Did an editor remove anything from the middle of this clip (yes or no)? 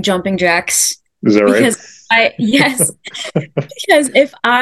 no